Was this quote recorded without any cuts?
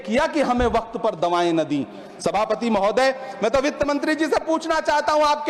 yes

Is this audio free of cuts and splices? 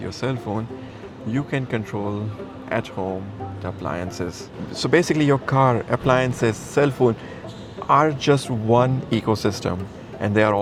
yes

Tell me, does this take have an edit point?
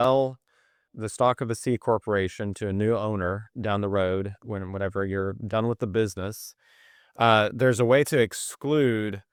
no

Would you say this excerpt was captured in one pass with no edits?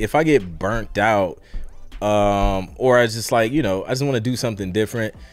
yes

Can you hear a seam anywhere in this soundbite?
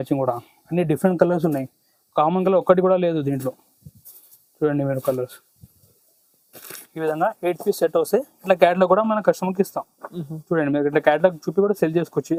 no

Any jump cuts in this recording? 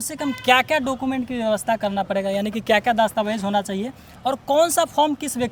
no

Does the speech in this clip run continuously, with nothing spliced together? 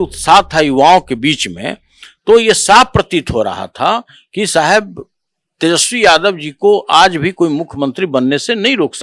yes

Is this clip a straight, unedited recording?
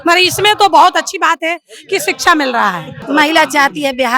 no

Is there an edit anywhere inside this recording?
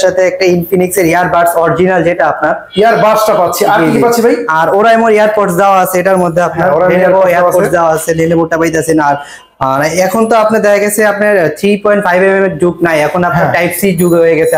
no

